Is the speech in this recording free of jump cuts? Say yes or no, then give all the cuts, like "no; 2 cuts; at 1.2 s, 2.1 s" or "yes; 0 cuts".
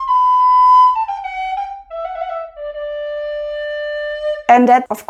yes; 0 cuts